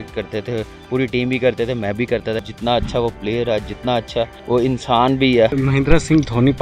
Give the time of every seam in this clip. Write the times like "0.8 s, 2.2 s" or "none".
2.5 s, 4.4 s, 5.5 s